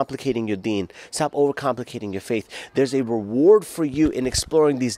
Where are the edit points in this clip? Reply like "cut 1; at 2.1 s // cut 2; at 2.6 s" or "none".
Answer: none